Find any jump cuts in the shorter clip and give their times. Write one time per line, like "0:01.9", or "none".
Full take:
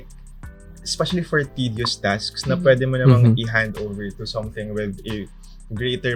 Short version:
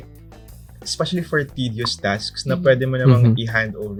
none